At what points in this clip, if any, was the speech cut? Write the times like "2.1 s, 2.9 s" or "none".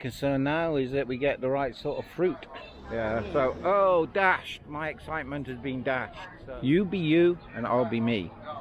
2.8 s, 6.4 s